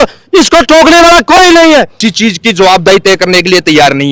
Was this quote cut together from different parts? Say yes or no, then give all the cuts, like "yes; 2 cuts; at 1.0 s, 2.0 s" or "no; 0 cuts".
no; 0 cuts